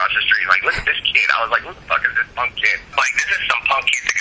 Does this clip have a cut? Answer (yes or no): yes